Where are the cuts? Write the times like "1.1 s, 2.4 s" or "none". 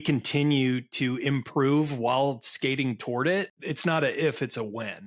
3.6 s